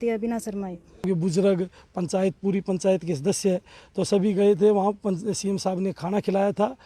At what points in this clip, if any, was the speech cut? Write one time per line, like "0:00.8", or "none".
0:01.0